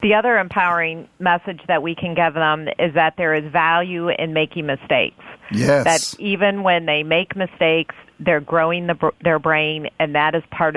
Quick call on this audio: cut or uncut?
uncut